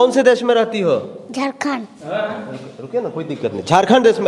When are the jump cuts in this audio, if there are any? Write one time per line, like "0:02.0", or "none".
none